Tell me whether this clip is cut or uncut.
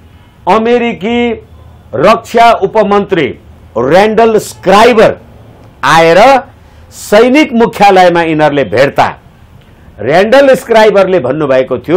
uncut